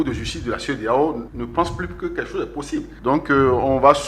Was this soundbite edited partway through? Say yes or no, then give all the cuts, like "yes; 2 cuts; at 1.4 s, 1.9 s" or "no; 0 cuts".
yes; 2 cuts; at 1.3 s, 2.8 s